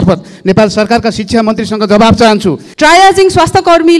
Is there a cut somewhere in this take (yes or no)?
yes